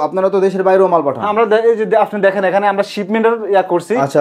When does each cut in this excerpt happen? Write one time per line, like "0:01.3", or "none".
none